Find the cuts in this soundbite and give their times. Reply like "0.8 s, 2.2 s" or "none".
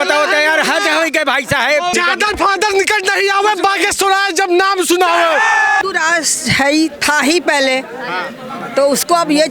1.9 s, 5.8 s